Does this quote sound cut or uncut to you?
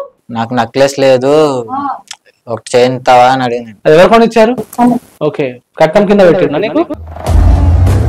cut